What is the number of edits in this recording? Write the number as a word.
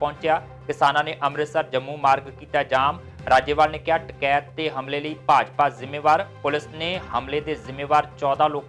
zero